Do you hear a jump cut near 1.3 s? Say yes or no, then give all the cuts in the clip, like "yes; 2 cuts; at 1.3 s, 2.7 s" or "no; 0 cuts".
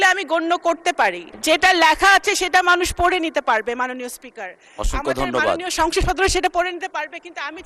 yes; 1 cut; at 1.3 s